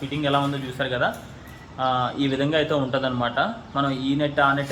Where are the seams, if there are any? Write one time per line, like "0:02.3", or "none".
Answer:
none